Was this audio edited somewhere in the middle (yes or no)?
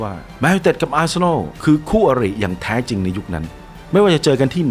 yes